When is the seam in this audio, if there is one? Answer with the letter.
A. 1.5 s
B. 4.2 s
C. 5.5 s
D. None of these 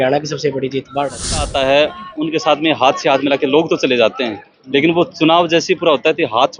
A